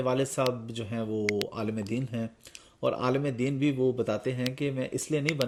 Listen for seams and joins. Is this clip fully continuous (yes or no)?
yes